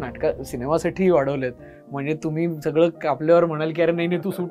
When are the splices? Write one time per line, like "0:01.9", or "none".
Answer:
none